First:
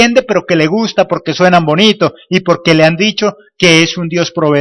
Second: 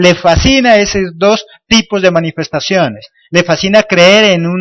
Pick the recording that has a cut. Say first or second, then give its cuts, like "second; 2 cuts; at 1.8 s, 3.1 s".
first; 1 cut; at 1.6 s